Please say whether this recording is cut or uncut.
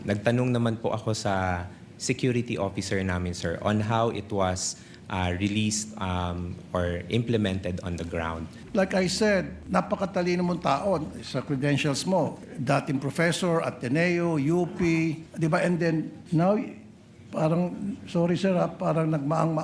cut